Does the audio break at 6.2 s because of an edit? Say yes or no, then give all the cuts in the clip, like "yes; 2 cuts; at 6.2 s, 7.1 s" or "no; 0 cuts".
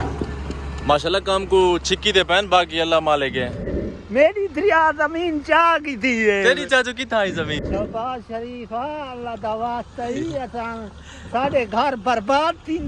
no; 2 cuts; at 3.4 s, 7.7 s